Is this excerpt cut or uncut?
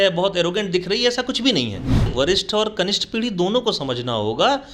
cut